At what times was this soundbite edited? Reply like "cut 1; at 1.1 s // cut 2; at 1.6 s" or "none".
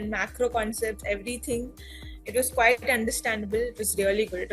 none